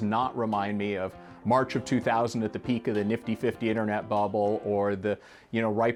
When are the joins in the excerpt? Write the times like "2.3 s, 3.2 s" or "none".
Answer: none